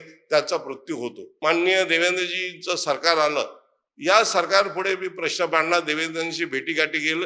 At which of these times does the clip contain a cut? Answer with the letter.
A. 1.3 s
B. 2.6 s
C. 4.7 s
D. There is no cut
A